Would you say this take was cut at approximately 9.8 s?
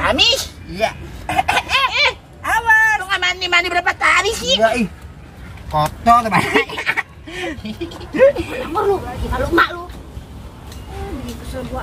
no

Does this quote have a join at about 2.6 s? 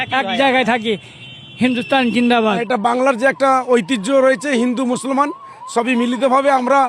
yes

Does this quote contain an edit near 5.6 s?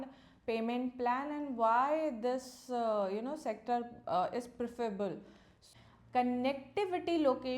yes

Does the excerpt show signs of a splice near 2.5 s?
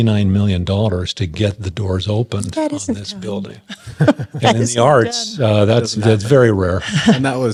no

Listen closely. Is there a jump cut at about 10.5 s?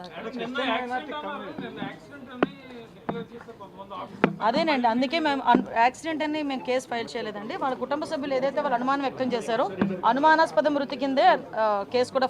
yes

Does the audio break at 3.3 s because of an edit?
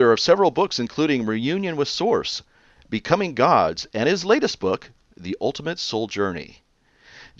yes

